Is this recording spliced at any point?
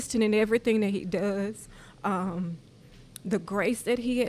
no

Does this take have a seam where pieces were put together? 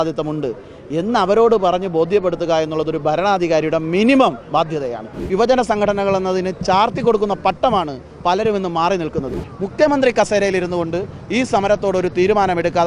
yes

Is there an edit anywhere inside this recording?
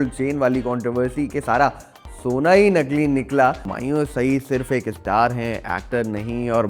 yes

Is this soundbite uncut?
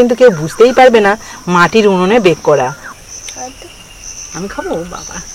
no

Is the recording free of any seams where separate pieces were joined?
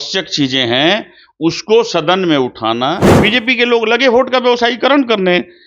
no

